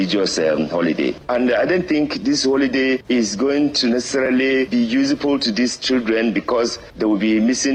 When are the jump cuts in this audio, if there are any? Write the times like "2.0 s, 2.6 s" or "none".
none

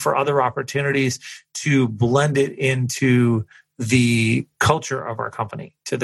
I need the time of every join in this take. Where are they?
none

